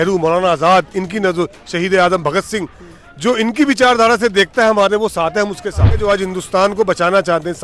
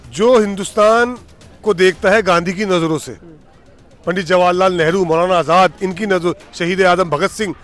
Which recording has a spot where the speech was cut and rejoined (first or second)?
first